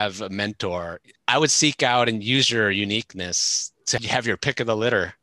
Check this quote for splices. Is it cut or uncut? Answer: cut